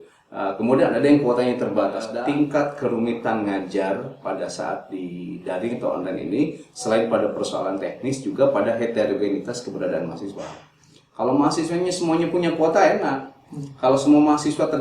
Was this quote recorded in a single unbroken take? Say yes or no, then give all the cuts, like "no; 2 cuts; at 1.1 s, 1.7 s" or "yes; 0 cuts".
no; 1 cut; at 2.1 s